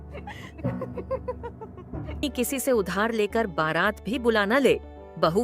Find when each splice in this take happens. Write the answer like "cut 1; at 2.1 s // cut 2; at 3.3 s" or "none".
cut 1; at 2.2 s